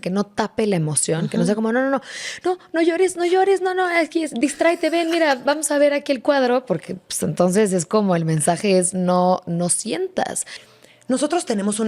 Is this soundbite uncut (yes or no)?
no